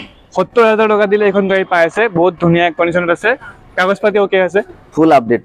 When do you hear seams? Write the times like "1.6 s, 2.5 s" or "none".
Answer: none